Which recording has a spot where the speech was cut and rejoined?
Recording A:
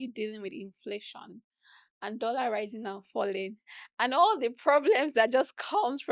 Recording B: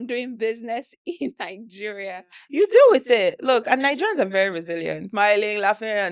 B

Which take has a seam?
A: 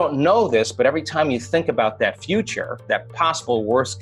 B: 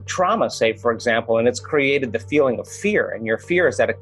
A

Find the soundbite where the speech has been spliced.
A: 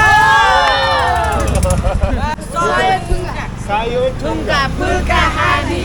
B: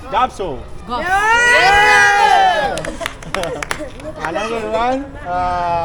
A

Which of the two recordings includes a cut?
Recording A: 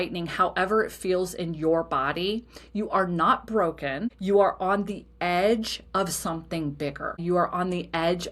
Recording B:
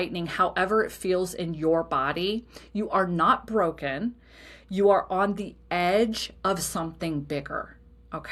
A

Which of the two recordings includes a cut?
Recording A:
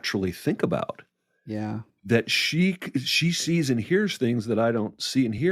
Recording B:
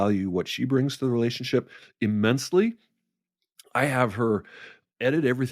B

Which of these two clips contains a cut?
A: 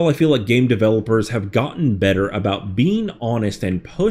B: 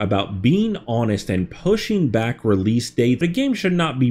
B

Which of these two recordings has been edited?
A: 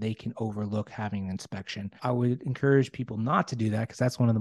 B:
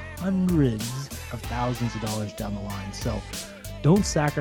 A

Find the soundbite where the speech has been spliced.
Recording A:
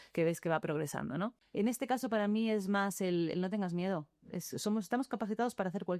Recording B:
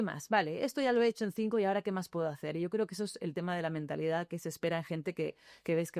A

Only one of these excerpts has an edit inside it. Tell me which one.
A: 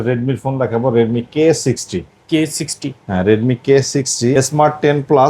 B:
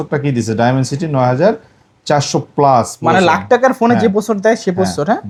A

